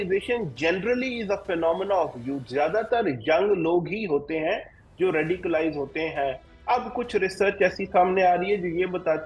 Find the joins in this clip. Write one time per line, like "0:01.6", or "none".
none